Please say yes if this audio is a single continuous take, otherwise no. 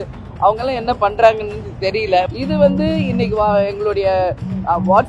no